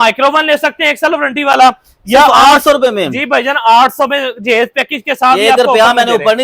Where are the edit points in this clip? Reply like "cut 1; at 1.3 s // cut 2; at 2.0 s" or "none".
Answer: none